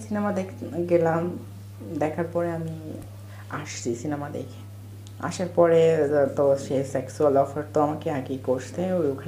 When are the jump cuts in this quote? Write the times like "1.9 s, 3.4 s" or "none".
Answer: none